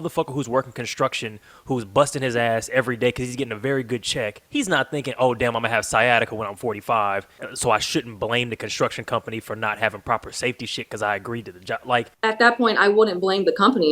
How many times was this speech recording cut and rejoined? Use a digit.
3